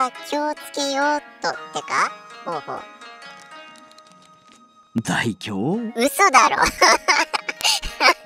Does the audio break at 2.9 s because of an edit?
no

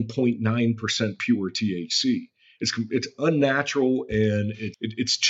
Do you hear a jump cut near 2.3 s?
no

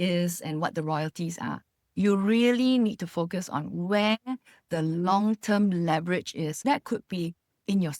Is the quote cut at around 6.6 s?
yes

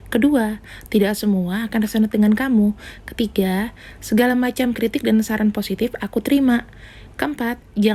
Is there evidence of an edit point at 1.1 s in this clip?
no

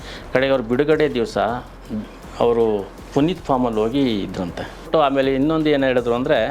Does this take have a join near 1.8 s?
no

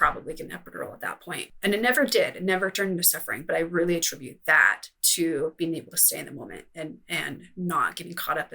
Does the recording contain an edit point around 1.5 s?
yes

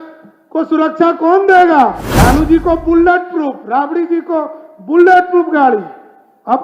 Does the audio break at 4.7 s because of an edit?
no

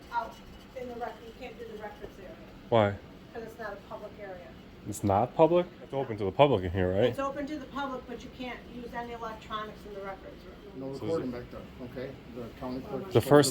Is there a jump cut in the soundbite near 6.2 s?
yes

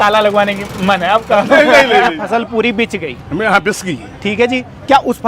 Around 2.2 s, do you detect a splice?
yes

